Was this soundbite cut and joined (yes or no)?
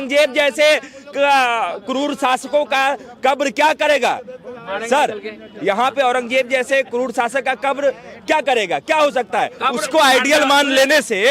no